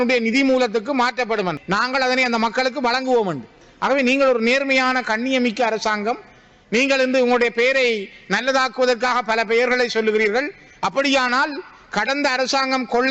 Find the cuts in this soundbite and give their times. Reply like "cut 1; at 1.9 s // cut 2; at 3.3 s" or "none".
cut 1; at 1.6 s